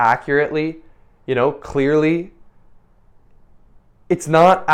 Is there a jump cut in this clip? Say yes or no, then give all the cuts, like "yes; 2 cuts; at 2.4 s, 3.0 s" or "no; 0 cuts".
no; 0 cuts